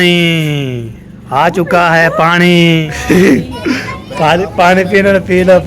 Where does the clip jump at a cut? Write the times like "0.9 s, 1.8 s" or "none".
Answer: 2.9 s